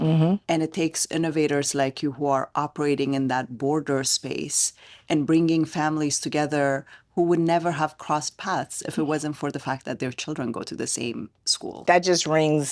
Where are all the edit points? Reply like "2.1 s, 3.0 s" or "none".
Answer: 11.8 s